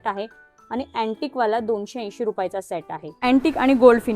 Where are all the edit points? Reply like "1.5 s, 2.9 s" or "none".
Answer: 3.2 s